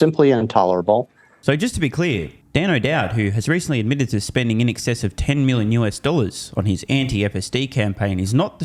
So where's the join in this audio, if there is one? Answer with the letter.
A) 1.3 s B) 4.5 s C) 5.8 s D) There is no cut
D